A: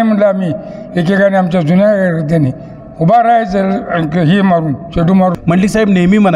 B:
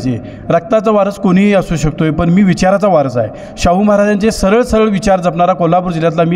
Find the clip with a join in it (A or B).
A